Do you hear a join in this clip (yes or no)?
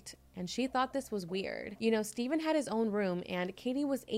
no